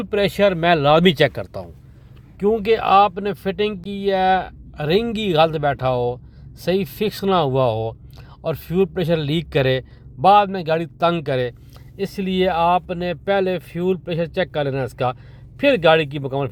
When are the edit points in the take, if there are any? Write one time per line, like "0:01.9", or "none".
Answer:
none